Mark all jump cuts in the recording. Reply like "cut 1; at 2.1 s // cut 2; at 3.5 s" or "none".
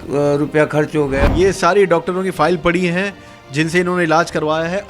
cut 1; at 1.2 s